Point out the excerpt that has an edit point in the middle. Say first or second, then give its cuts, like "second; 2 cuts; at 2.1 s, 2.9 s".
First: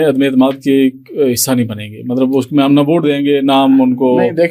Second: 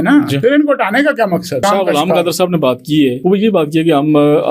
second; 2 cuts; at 1.6 s, 3.2 s